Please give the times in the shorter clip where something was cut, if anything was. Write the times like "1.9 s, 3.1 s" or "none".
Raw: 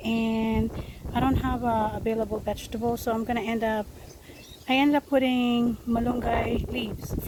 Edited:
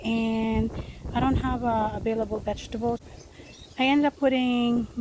3.0 s